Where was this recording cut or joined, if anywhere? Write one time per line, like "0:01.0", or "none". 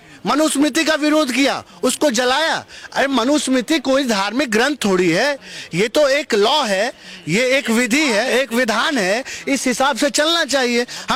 none